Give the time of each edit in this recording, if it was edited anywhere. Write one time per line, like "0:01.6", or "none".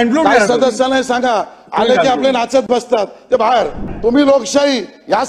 0:03.9